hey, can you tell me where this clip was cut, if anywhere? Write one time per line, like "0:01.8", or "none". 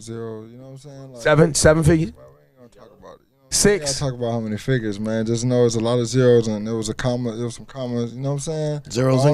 0:03.9